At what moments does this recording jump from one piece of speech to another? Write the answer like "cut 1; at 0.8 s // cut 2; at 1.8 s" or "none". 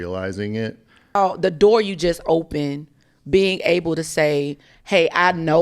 cut 1; at 1.2 s